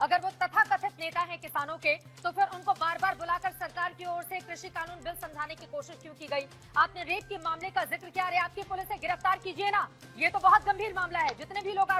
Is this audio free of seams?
yes; 0 cuts

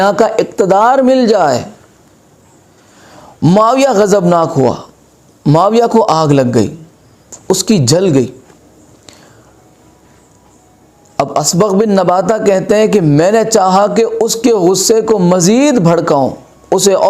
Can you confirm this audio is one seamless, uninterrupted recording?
yes; 0 cuts

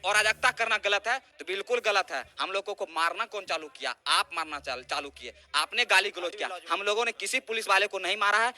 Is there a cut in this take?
no; 0 cuts

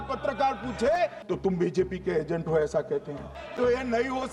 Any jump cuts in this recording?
yes; 2 cuts; at 1.2 s, 3.4 s

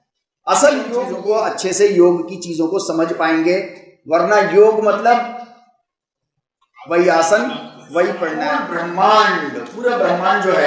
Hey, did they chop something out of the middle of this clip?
yes; 2 cuts; at 1.1 s, 8.5 s

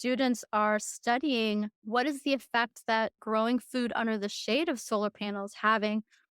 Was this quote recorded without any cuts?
no; 2 cuts; at 1.8 s, 3.2 s

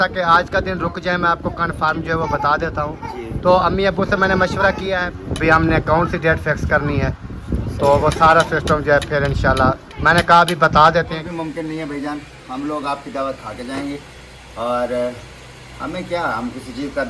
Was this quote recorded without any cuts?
no; 2 cuts; at 5.1 s, 11.2 s

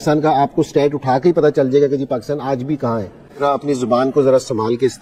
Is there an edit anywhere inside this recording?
yes; 1 cut; at 3.4 s

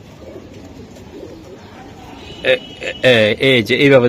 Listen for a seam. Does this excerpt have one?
no; 0 cuts

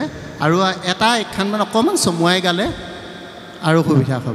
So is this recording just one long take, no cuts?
yes; 0 cuts

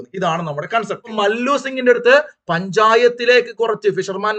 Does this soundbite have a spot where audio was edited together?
yes; 1 cut; at 1.1 s

